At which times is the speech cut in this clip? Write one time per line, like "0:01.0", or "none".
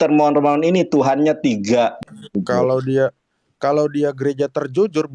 0:02.0